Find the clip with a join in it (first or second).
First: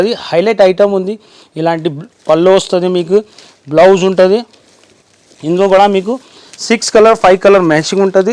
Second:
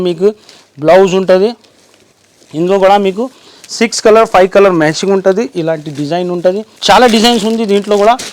second